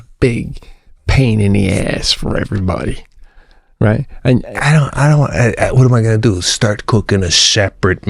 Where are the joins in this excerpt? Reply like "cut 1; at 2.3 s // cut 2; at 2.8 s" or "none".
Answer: none